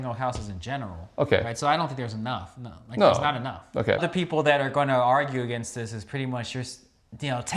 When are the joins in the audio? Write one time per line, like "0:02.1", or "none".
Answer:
0:04.1